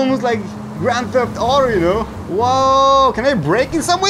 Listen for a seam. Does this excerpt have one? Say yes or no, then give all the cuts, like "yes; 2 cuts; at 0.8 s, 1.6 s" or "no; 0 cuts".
yes; 1 cut; at 2.1 s